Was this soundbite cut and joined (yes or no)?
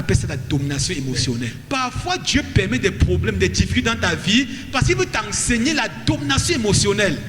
yes